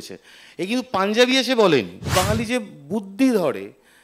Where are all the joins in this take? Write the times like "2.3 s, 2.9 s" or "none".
2.0 s